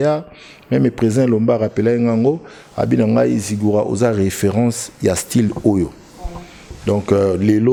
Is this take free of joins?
yes; 0 cuts

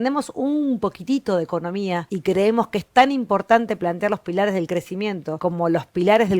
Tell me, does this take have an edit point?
yes; 2 cuts; at 2.1 s, 5.3 s

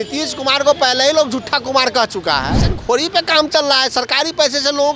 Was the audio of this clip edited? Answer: yes; 1 cut; at 2.7 s

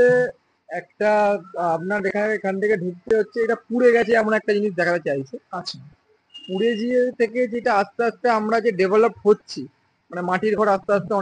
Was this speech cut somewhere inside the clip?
no; 0 cuts

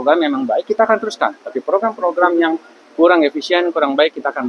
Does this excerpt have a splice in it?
no; 0 cuts

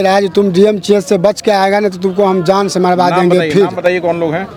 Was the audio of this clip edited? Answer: no; 0 cuts

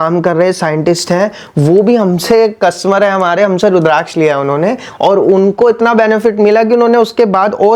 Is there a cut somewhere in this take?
no; 0 cuts

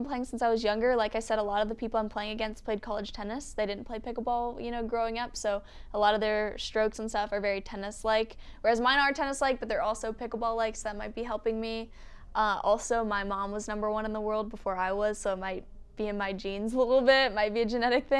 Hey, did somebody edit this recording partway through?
no; 0 cuts

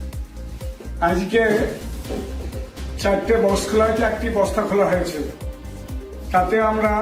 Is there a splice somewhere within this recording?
yes; 1 cut; at 1.0 s

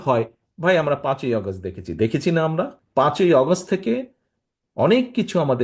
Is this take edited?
yes; 1 cut; at 2.8 s

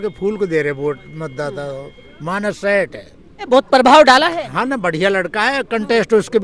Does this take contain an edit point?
yes; 1 cut; at 3.5 s

